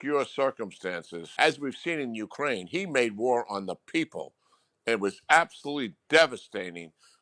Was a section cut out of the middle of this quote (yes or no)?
yes